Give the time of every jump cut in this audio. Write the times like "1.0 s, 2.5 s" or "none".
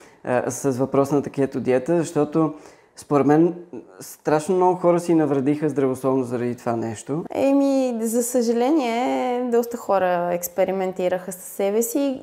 7.2 s